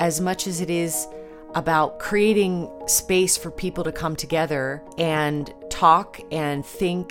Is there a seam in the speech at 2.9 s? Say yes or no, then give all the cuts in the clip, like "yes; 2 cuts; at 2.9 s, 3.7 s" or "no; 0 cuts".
yes; 3 cuts; at 2.9 s, 4.8 s, 5.6 s